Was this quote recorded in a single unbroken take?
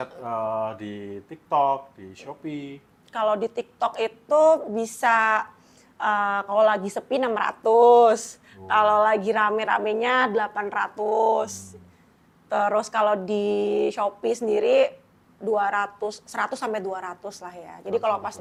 yes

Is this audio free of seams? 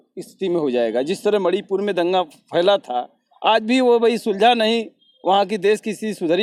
yes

